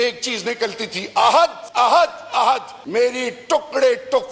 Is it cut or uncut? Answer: cut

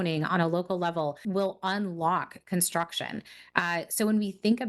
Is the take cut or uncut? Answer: cut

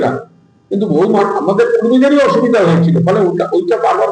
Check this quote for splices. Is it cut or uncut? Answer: uncut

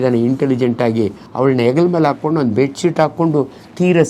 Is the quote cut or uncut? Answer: cut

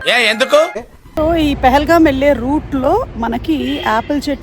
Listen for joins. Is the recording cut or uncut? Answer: uncut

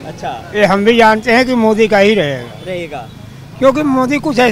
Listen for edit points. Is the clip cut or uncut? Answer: uncut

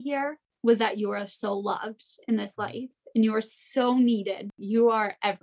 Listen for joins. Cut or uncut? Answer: cut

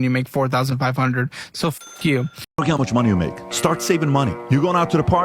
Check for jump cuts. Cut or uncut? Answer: cut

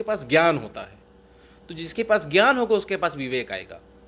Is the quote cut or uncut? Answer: uncut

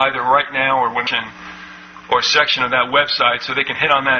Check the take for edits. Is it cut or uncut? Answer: uncut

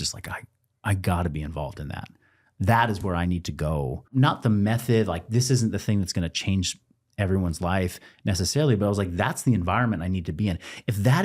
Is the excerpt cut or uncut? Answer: cut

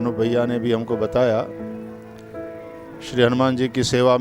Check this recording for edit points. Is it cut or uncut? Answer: cut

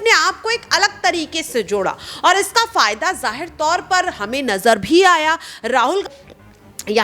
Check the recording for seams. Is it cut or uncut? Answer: cut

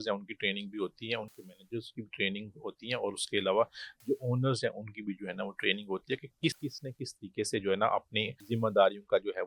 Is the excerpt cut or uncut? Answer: cut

